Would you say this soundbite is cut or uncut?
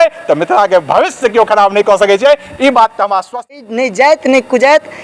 cut